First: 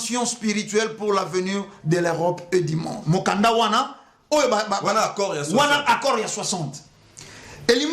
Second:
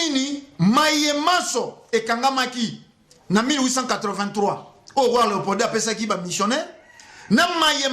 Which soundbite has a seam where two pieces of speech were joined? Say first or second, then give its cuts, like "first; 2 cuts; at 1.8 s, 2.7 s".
first; 1 cut; at 2.9 s